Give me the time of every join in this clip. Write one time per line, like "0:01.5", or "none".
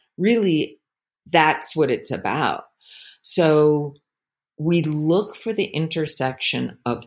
none

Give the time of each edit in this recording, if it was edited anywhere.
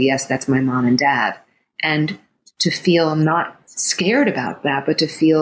none

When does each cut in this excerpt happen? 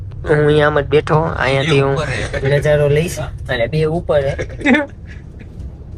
0:04.6

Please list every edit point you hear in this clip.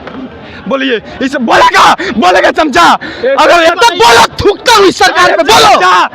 0:03.7

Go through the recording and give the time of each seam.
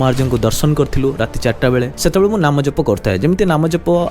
0:02.0

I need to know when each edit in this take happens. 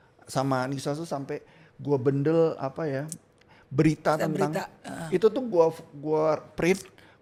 none

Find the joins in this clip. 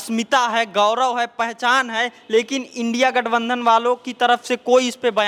none

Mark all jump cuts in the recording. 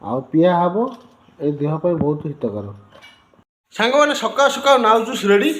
0:03.6

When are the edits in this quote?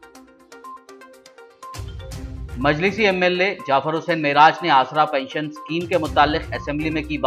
0:00.9

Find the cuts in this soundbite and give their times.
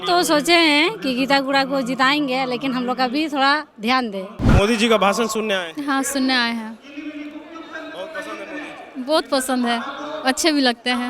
0:04.4

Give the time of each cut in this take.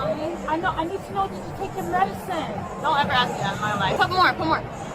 0:04.0

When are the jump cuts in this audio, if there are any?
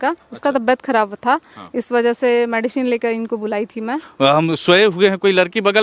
0:04.0

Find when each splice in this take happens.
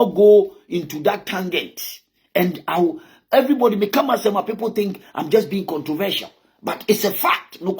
none

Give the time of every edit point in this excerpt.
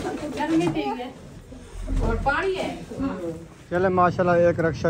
0:03.6

